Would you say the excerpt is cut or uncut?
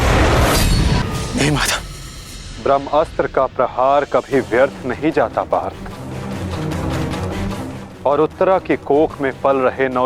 cut